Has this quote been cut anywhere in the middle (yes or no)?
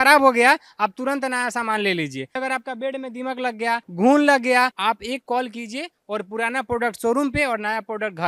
yes